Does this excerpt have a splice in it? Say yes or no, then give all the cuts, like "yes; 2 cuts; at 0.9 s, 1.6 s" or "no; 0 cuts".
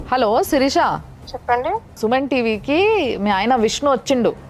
no; 0 cuts